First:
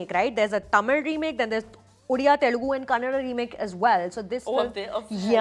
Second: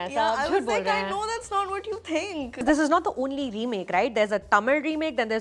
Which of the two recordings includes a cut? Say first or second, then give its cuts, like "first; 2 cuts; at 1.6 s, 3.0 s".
second; 1 cut; at 2.6 s